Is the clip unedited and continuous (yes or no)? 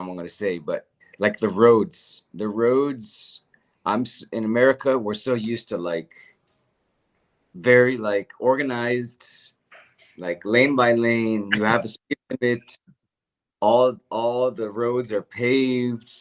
no